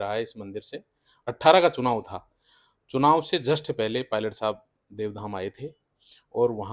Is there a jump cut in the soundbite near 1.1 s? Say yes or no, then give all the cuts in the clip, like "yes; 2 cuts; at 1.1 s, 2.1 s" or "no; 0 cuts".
yes; 1 cut; at 1.1 s